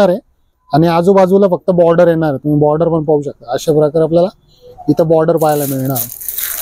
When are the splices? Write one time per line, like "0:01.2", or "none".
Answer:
none